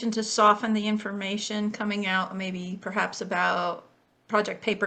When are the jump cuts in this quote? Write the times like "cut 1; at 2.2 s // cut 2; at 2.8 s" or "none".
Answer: none